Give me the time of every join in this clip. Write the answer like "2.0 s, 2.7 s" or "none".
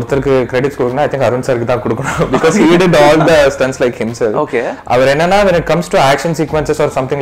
none